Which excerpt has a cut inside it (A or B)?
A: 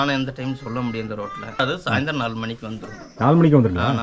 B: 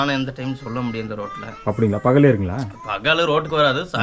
A